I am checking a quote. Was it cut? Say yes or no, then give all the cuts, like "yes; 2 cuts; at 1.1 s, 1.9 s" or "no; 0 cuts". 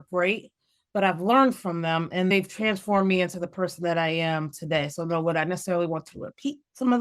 yes; 1 cut; at 2.3 s